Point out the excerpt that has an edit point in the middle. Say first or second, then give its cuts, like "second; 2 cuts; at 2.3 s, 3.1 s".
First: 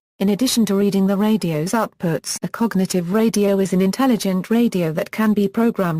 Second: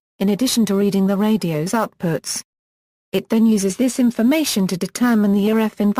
second; 1 cut; at 2.4 s